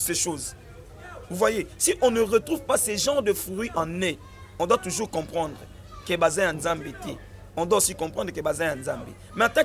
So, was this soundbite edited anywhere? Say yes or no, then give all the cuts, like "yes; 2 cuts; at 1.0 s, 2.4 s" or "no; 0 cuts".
no; 0 cuts